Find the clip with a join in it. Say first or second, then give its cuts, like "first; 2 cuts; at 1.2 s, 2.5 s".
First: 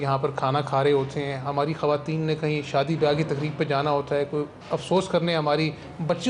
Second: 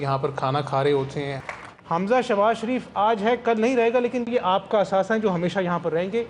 second; 1 cut; at 1.4 s